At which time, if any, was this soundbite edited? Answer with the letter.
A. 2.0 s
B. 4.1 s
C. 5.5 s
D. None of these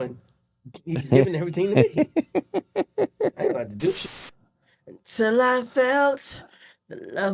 B